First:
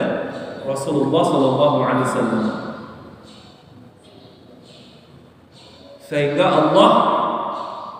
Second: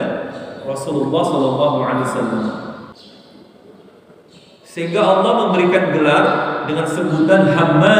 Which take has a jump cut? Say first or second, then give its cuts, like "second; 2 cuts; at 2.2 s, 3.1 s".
second; 1 cut; at 2.9 s